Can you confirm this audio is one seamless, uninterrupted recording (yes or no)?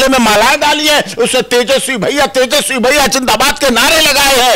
yes